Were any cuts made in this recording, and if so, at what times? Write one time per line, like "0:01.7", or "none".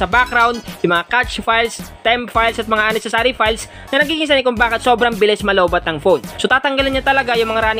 0:06.3